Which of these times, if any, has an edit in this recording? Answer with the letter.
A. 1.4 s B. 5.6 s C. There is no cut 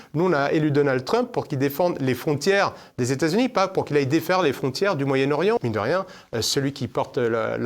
B